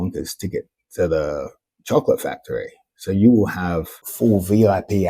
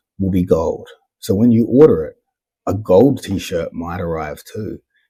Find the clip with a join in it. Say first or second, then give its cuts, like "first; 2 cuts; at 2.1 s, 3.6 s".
first; 1 cut; at 4.0 s